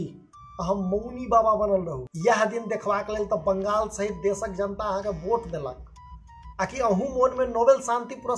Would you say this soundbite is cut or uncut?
cut